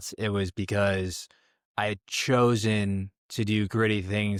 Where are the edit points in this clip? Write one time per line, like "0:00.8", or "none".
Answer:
none